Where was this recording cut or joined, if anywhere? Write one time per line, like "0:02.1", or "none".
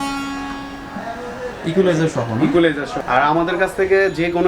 0:03.0